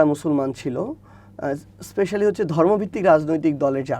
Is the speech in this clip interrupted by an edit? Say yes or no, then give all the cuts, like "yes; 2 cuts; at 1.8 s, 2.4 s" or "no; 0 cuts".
no; 0 cuts